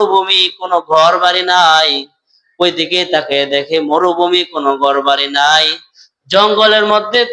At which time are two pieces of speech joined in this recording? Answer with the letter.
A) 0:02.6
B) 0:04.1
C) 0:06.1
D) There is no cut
D